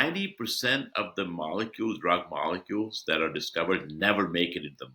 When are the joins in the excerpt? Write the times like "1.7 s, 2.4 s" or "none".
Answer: none